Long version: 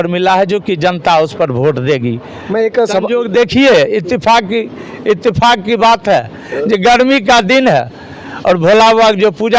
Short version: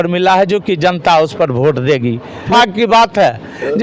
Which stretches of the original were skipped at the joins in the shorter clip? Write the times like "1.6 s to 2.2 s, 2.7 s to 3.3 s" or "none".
2.5 s to 5.4 s